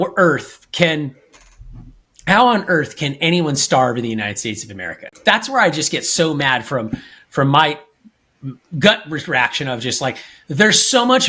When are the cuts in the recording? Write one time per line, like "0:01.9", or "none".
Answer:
none